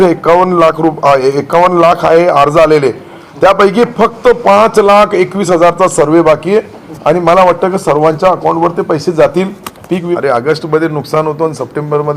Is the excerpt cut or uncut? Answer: cut